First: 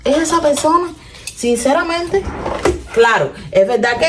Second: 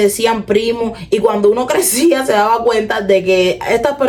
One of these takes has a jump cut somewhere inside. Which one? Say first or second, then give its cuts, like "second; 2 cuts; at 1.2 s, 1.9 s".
first; 1 cut; at 2.4 s